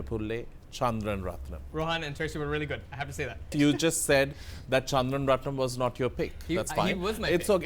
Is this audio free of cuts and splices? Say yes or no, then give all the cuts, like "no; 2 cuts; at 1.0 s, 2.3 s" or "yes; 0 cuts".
no; 2 cuts; at 1.6 s, 3.5 s